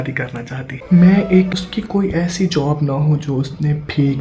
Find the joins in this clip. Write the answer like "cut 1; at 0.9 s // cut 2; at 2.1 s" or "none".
cut 1; at 1.5 s

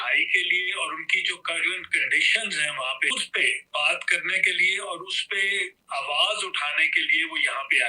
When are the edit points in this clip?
cut 1; at 3.1 s

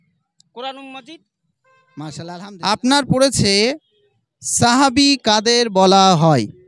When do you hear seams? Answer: cut 1; at 2.3 s

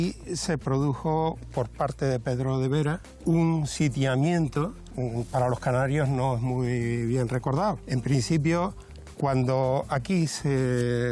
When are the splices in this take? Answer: none

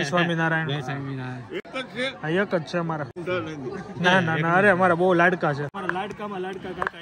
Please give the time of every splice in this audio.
cut 1; at 3.2 s // cut 2; at 5.7 s

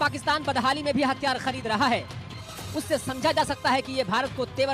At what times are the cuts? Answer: none

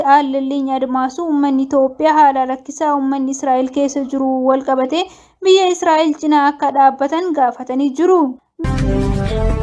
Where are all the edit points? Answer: cut 1; at 8.5 s

